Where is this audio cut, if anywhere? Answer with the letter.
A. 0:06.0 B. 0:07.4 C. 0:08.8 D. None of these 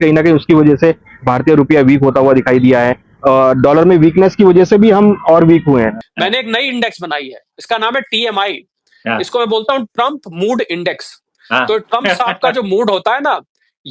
A